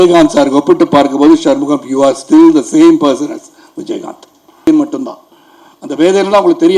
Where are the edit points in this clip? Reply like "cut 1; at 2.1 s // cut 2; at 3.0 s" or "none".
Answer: cut 1; at 4.7 s

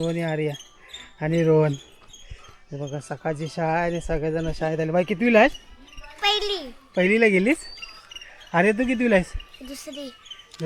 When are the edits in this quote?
none

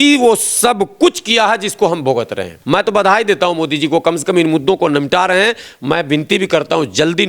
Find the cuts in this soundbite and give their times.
cut 1; at 2.5 s

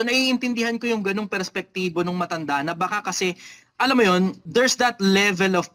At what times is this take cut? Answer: cut 1; at 4.4 s

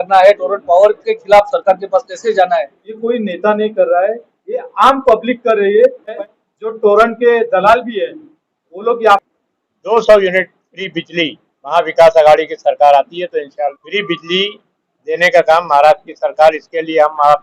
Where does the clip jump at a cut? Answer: cut 1; at 2.8 s // cut 2; at 6.2 s // cut 3; at 9.2 s // cut 4; at 13.7 s

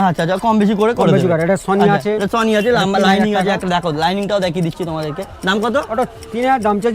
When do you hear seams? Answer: none

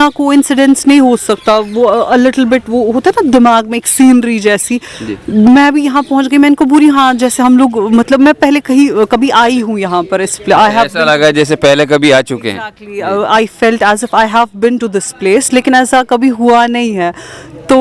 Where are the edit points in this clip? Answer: none

